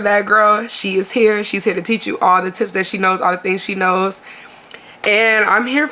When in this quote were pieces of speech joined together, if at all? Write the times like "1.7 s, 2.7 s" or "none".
none

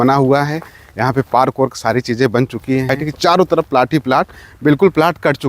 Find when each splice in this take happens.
2.9 s

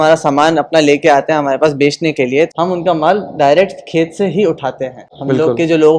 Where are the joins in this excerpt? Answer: 2.5 s

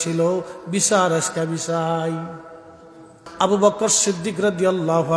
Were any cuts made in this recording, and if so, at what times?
3.2 s

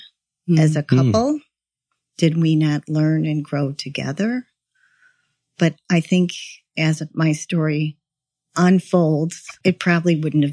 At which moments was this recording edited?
9.6 s

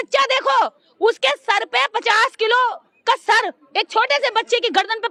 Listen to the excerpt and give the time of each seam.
none

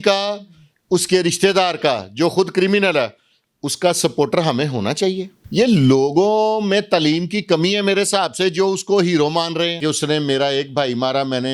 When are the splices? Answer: 5.3 s, 9.8 s

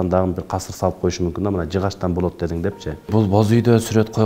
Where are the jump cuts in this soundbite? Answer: 3.1 s

